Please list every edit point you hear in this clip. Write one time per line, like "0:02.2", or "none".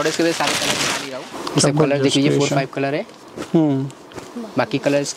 0:01.3